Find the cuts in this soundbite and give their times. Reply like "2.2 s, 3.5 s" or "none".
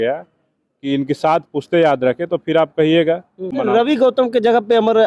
3.5 s